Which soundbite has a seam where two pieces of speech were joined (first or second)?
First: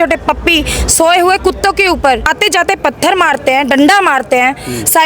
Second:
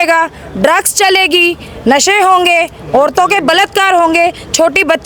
first